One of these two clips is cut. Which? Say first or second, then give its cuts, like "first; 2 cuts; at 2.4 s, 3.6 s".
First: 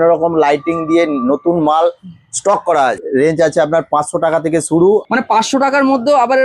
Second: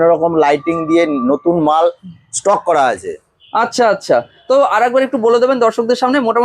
first; 2 cuts; at 3.0 s, 5.1 s